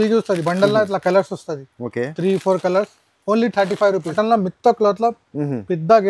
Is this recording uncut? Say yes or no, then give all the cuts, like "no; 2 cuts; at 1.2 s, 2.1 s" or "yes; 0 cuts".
no; 1 cut; at 4.1 s